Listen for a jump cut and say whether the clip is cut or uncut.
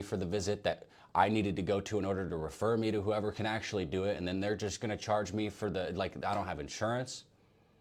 uncut